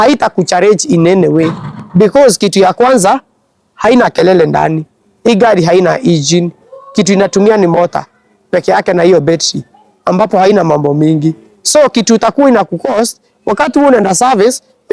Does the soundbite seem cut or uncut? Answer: uncut